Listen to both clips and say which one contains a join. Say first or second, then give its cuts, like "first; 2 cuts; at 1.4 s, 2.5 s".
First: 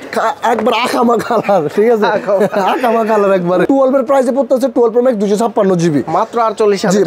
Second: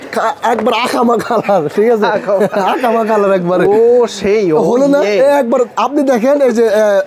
first; 1 cut; at 3.6 s